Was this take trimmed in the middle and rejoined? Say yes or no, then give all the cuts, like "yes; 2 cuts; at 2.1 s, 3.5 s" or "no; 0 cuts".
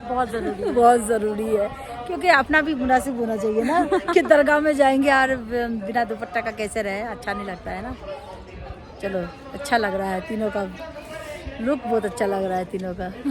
no; 0 cuts